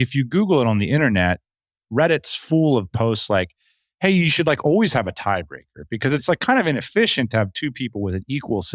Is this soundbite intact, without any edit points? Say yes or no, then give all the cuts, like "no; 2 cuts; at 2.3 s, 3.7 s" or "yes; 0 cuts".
no; 1 cut; at 6.2 s